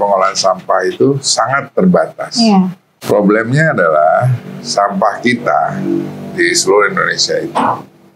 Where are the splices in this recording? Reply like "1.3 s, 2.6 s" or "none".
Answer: 2.9 s